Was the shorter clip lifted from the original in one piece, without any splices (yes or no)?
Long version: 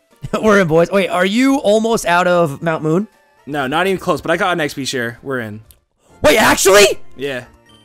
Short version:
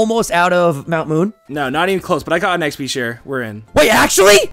no